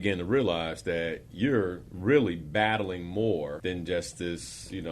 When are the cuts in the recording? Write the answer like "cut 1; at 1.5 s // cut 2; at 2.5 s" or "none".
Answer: cut 1; at 1.9 s // cut 2; at 3.6 s